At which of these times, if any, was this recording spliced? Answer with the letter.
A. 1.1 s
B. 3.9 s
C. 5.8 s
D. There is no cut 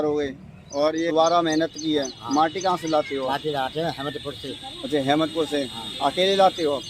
A